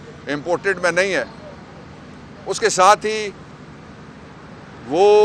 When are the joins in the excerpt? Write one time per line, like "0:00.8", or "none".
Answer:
none